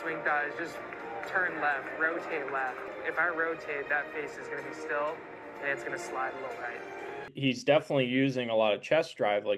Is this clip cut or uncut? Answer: cut